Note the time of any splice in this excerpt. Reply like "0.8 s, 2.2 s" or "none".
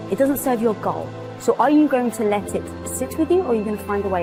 none